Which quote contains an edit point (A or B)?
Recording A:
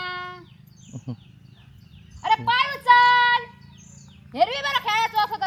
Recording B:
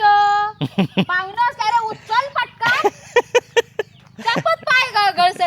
B